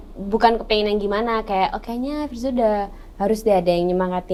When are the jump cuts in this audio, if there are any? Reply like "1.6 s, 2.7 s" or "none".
none